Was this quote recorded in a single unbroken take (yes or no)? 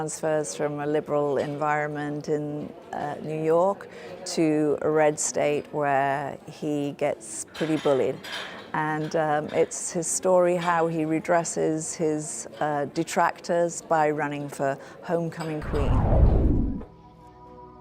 no